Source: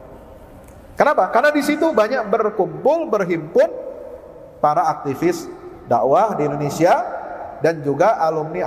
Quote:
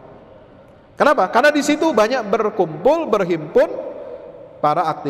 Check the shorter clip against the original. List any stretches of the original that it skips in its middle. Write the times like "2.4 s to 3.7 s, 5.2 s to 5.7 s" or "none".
none